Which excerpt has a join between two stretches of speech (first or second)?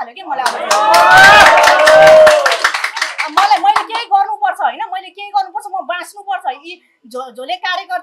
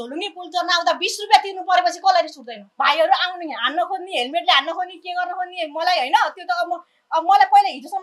second